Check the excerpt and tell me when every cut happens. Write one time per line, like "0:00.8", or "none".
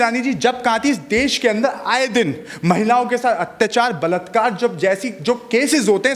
none